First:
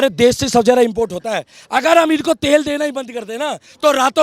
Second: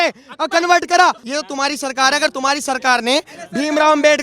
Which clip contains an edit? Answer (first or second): second